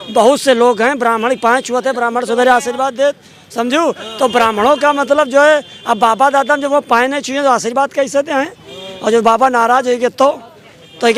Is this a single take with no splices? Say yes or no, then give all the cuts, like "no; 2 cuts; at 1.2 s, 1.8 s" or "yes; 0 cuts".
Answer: yes; 0 cuts